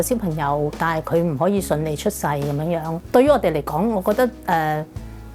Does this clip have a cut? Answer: yes; 1 cut; at 2.9 s

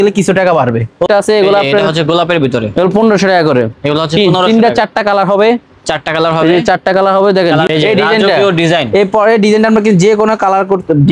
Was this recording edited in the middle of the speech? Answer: yes; 2 cuts; at 1.1 s, 7.7 s

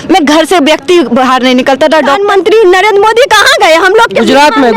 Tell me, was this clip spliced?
yes; 1 cut; at 2.2 s

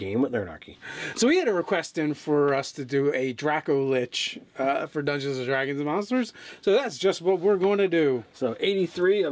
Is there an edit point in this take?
yes; 1 cut; at 3.6 s

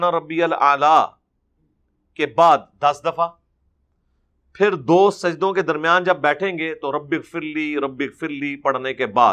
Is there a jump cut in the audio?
no; 0 cuts

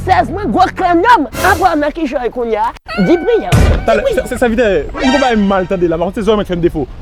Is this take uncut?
yes; 0 cuts

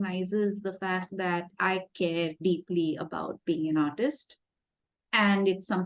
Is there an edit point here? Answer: no; 0 cuts

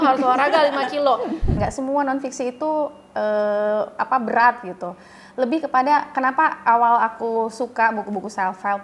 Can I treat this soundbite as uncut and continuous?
no; 1 cut; at 1.5 s

